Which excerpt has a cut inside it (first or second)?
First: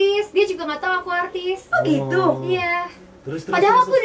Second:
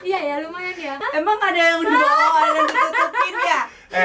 second